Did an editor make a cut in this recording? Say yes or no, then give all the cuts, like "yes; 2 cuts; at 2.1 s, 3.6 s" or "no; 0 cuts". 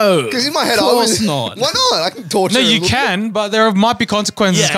no; 0 cuts